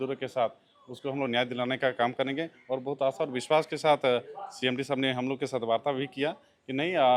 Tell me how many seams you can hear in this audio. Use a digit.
0